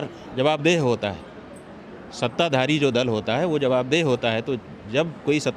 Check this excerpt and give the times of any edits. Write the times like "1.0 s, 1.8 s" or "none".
none